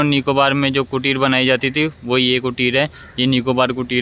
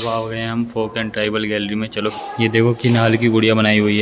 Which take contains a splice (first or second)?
second